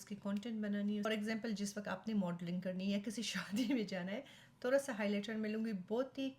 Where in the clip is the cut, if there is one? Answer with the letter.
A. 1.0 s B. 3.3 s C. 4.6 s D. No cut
A